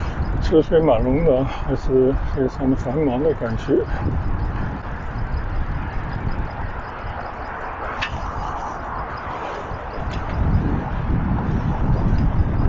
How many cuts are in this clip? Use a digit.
0